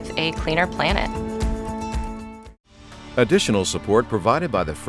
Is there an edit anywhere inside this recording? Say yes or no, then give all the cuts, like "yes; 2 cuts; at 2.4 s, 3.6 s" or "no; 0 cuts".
yes; 1 cut; at 3.0 s